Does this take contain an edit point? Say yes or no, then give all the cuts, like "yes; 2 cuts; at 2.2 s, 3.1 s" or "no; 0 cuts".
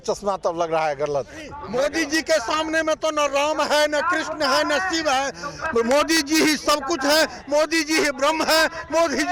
yes; 1 cut; at 1.6 s